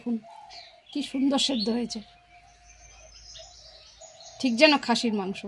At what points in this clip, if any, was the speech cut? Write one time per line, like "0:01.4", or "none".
none